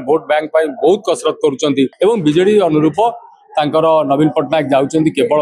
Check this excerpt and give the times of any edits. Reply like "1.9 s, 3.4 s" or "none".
1.9 s